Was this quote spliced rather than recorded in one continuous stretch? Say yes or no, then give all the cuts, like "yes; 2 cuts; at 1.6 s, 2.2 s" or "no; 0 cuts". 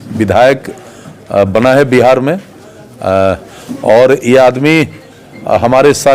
no; 0 cuts